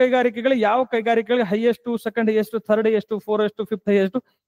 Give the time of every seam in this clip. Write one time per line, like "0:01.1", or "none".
none

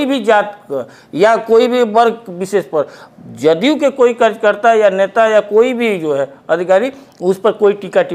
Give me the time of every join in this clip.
none

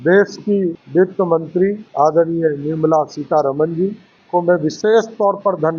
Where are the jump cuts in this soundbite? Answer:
0:00.8
0:01.8
0:04.1

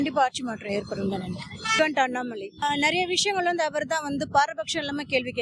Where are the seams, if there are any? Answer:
0:01.6
0:02.6

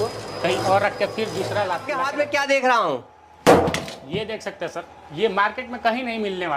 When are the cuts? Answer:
0:01.9

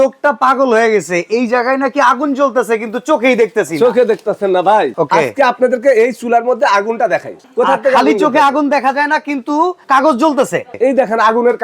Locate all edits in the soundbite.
0:05.0
0:07.4
0:09.8
0:10.7

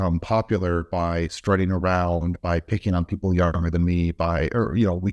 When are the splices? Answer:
none

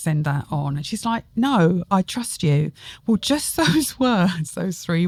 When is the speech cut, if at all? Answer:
none

